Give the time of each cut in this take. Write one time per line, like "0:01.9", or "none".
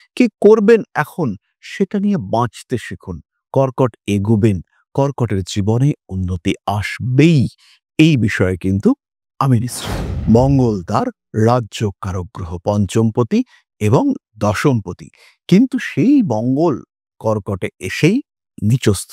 0:10.1